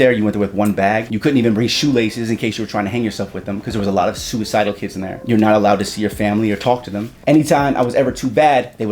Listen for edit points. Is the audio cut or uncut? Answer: cut